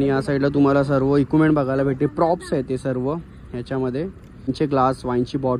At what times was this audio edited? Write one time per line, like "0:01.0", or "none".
0:04.5